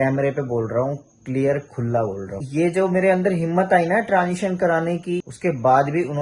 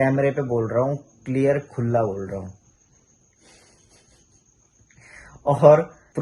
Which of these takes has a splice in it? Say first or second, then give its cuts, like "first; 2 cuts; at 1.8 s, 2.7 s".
first; 2 cuts; at 2.4 s, 5.3 s